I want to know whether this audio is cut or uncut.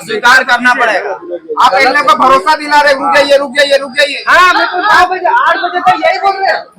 uncut